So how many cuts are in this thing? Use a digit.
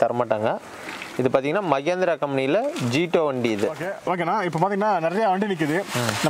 1